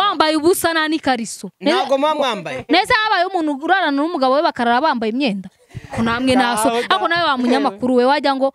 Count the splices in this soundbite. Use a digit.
0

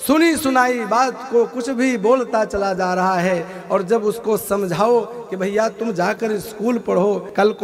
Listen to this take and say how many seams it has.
0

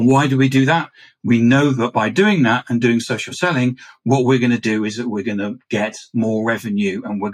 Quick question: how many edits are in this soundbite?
0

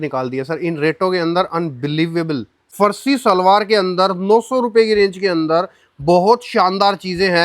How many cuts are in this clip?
1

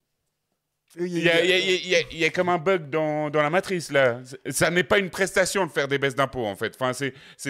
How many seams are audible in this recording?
0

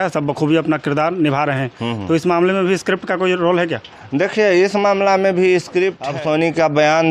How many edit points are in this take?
1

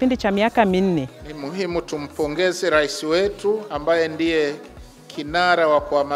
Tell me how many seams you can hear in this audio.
1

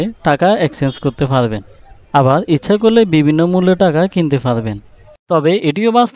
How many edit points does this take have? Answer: 1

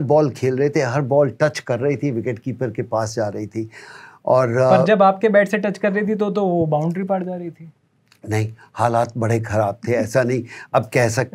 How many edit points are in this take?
0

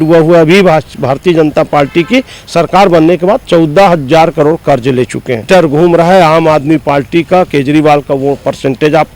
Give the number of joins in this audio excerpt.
1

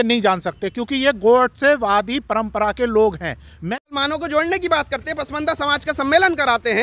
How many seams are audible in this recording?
1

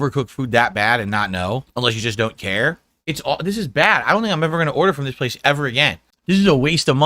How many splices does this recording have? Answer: 3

